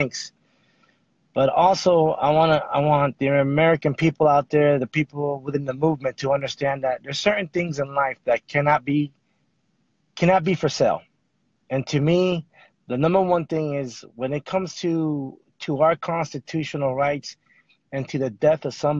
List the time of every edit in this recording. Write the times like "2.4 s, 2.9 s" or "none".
1.7 s